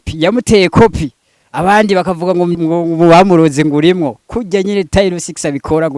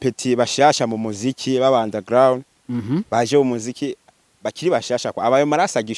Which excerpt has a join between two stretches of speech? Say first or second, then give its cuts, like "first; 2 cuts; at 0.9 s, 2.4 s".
first; 2 cuts; at 2.6 s, 4.3 s